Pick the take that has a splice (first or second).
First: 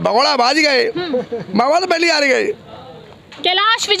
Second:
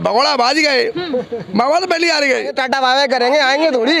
second